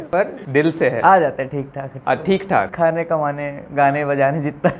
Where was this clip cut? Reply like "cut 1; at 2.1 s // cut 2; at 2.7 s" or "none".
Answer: cut 1; at 2.7 s

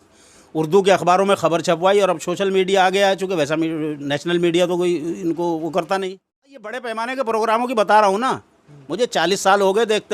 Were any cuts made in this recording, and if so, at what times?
cut 1; at 6.8 s

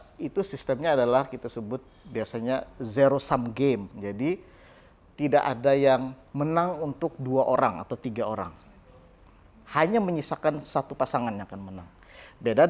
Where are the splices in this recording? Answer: none

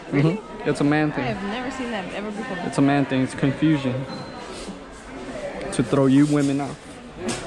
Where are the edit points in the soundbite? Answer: none

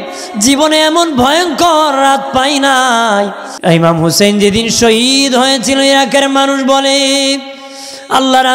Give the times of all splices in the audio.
cut 1; at 3.4 s

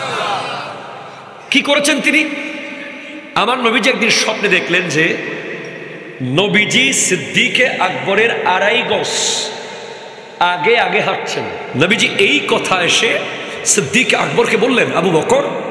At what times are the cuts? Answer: cut 1; at 11.6 s

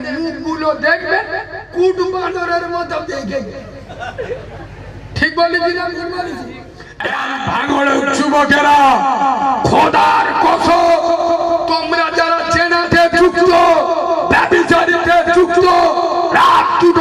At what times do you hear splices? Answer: cut 1; at 7.1 s

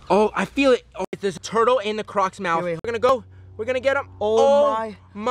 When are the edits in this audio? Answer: cut 1; at 1.2 s // cut 2; at 3.1 s

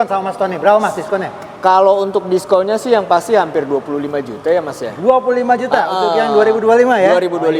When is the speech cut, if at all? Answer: none

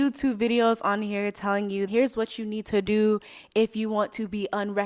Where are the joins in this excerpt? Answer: cut 1; at 1.9 s

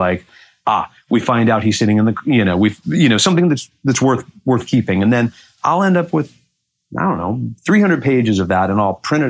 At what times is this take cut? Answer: none

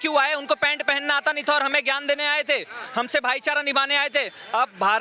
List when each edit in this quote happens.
none

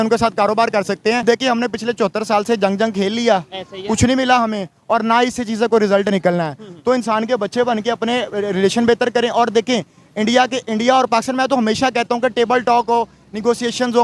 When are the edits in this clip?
cut 1; at 1.2 s

